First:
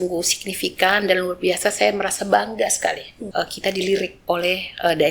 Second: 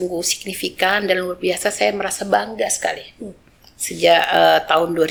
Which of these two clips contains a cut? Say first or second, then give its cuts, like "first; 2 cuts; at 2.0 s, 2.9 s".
first; 2 cuts; at 3.1 s, 4.2 s